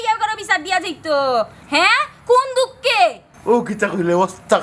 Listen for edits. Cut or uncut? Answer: uncut